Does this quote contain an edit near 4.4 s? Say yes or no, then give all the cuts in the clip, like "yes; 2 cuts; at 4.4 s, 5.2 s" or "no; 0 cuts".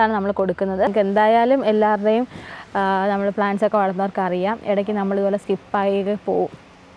no; 1 cut; at 0.9 s